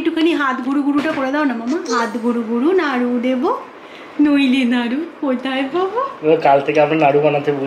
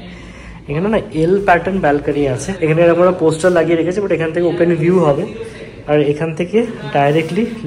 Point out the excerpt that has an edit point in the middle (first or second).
second